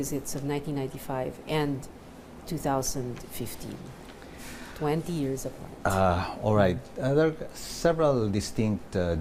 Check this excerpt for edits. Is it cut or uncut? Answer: uncut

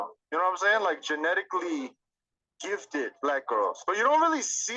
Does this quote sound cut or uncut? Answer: uncut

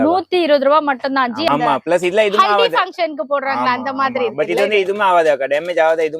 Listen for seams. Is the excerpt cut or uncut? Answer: cut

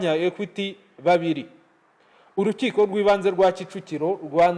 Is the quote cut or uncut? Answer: uncut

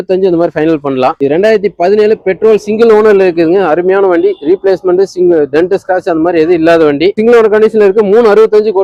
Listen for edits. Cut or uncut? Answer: uncut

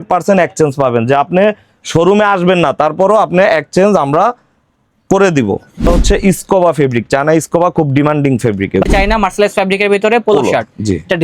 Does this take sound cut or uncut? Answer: cut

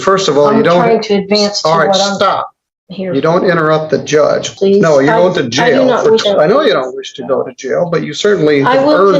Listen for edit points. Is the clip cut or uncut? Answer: cut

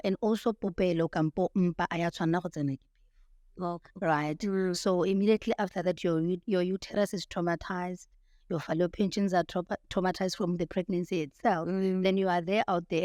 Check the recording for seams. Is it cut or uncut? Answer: uncut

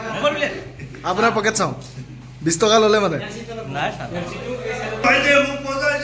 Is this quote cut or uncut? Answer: cut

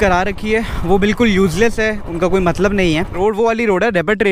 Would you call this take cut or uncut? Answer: cut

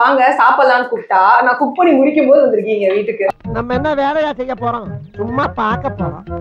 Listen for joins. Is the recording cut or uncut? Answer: uncut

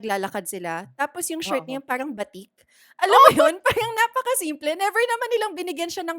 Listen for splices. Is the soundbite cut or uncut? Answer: uncut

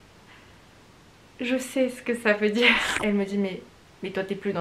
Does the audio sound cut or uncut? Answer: cut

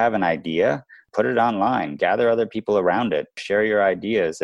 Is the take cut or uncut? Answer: cut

